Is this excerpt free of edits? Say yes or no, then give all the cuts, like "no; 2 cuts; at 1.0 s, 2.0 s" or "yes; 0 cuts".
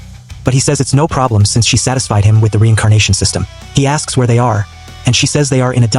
yes; 0 cuts